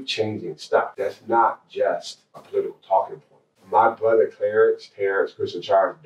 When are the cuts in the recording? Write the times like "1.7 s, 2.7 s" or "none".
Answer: 0.9 s, 2.5 s, 3.5 s